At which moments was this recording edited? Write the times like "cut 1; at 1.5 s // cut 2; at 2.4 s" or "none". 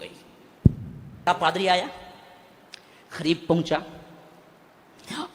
cut 1; at 1.3 s